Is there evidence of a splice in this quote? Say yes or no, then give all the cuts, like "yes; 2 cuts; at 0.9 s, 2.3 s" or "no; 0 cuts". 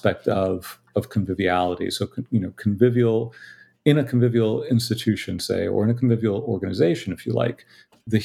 no; 0 cuts